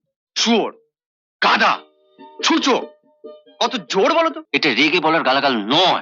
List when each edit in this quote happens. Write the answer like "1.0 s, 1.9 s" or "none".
4.4 s